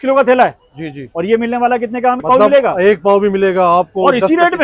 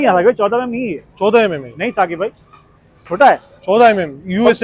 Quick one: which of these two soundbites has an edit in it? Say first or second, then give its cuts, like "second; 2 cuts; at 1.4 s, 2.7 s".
first; 1 cut; at 2.2 s